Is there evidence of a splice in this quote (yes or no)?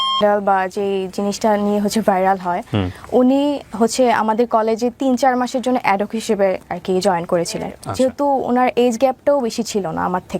yes